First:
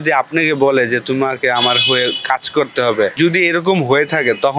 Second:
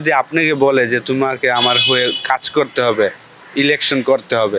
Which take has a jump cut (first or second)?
first